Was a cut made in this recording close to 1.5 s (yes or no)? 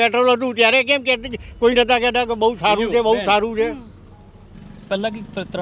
no